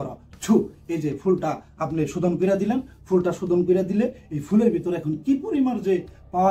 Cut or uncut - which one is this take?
uncut